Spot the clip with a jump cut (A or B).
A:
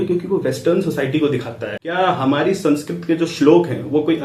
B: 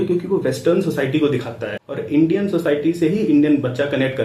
A